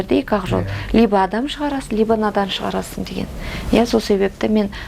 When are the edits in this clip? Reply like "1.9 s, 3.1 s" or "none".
none

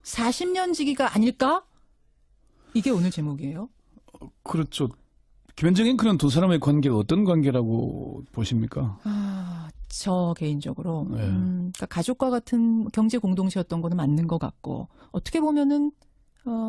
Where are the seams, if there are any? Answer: none

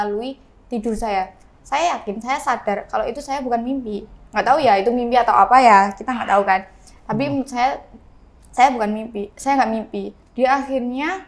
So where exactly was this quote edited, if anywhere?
10.2 s

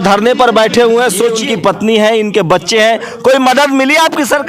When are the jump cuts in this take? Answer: 1.4 s

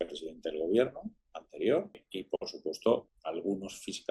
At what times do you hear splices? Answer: 2.1 s, 3.2 s

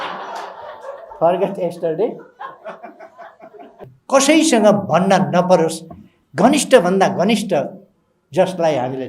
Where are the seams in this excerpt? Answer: 3.7 s

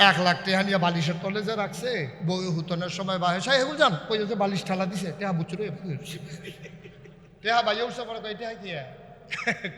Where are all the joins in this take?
2.1 s, 7.3 s

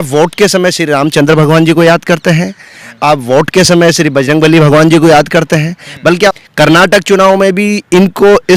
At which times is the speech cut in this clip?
6.4 s

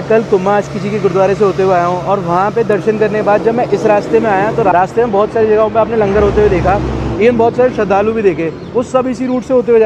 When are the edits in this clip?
none

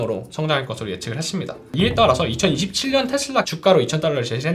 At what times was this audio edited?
1.7 s, 3.5 s

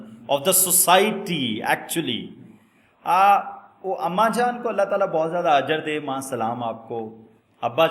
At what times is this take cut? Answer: none

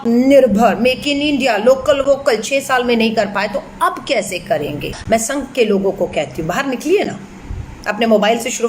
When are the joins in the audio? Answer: 5.0 s

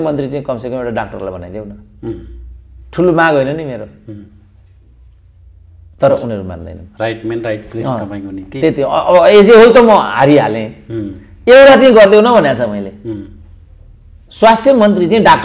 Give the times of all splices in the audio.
none

